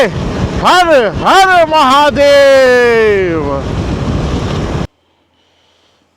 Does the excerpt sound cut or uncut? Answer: cut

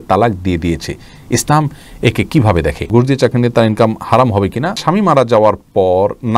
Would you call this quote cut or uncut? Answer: cut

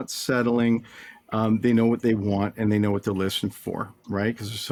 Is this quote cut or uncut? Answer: uncut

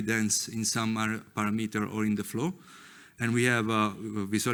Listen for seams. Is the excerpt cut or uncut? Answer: uncut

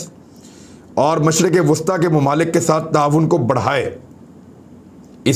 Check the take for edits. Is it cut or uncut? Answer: uncut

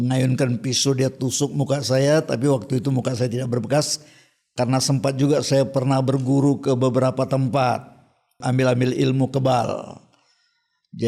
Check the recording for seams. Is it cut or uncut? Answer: cut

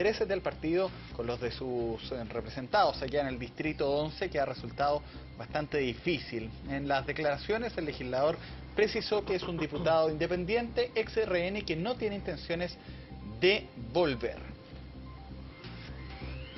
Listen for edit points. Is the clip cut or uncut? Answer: uncut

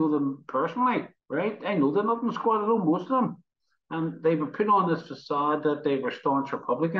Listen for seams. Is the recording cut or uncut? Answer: cut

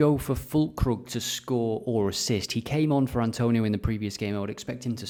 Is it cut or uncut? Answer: uncut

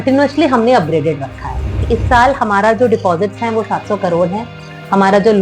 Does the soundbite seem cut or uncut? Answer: cut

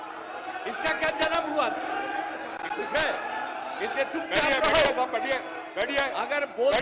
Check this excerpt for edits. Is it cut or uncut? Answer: uncut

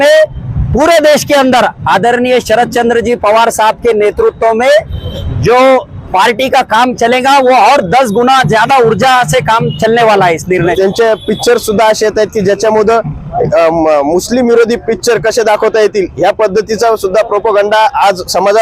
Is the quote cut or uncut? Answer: cut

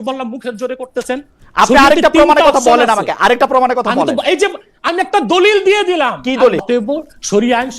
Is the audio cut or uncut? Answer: cut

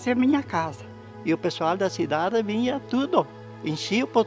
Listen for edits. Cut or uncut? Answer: cut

